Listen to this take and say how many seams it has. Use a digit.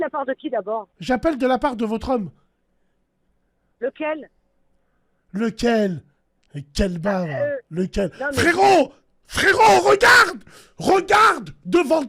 1